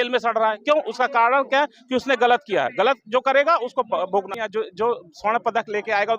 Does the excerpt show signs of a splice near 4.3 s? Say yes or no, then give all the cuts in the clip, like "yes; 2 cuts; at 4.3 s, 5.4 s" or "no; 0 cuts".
yes; 1 cut; at 4.3 s